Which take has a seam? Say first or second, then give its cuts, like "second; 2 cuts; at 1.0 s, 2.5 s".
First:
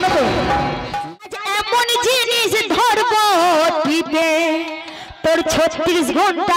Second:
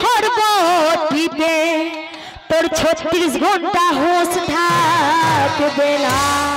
first; 1 cut; at 0.9 s